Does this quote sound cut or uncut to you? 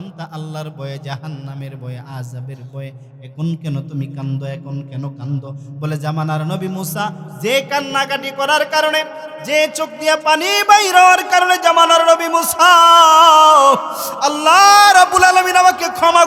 uncut